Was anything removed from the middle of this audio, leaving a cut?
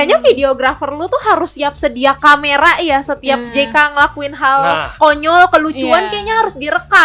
no; 0 cuts

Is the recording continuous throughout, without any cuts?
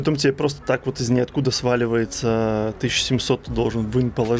yes; 0 cuts

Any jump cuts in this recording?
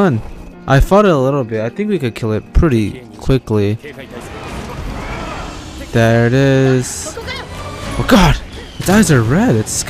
no; 0 cuts

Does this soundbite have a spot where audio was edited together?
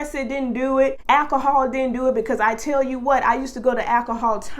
yes; 1 cut; at 1.0 s

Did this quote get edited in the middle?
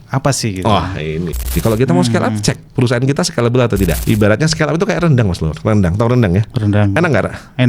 yes; 2 cuts; at 1.5 s, 4.0 s

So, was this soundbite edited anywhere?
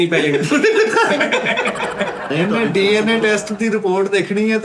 yes; 1 cut; at 2.3 s

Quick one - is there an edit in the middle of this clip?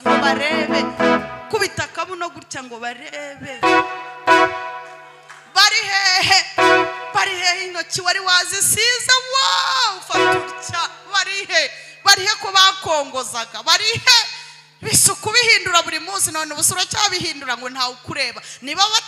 no; 0 cuts

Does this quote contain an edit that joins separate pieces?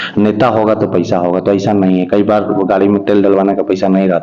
no; 0 cuts

